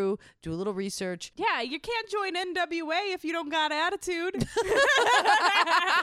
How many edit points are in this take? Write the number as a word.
one